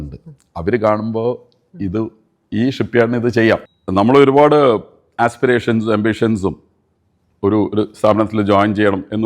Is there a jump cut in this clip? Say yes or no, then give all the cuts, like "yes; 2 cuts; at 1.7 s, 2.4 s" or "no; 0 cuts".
yes; 1 cut; at 3.8 s